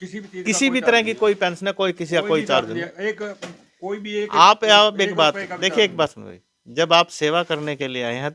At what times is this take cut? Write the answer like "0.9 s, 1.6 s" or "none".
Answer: none